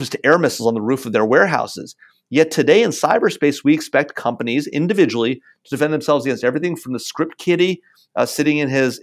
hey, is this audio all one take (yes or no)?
yes